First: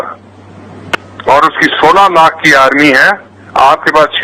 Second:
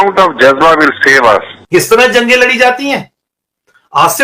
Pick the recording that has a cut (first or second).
second